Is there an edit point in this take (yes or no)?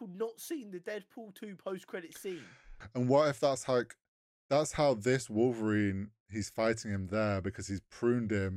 yes